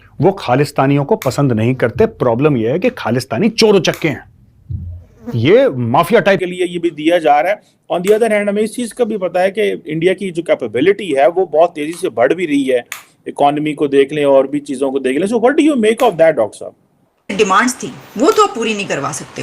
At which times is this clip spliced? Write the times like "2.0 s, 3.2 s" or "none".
6.4 s, 17.3 s